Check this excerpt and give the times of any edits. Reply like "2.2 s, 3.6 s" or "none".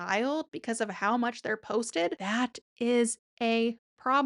2.2 s